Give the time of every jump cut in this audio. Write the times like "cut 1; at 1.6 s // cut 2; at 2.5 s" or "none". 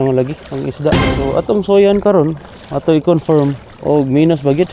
cut 1; at 1.1 s // cut 2; at 3.7 s